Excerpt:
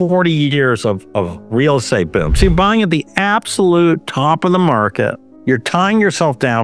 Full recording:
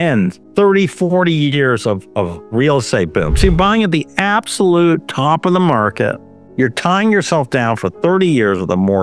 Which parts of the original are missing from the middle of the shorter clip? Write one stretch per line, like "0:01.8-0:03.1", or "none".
0:06.3-0:06.4